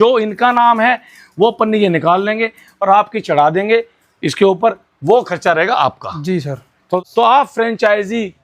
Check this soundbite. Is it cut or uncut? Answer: cut